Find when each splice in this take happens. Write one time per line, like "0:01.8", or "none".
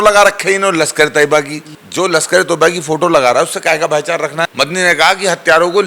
0:01.8
0:04.5